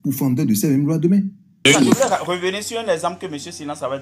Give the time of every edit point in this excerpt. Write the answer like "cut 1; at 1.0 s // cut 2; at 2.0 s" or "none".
cut 1; at 1.7 s